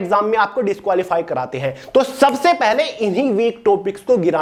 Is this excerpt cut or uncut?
uncut